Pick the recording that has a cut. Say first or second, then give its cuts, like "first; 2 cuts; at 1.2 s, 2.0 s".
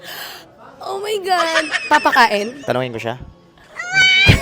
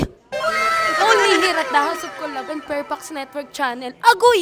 first; 1 cut; at 2.6 s